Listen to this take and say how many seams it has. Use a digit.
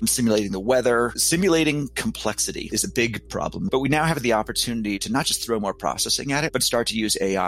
1